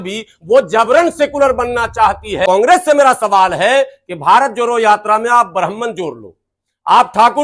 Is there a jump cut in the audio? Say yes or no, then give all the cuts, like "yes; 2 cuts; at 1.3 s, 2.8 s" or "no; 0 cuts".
yes; 1 cut; at 2.4 s